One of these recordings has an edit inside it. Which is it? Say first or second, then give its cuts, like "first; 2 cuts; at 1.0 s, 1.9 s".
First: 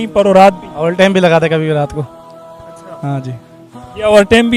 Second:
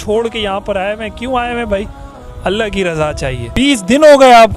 second; 1 cut; at 3.5 s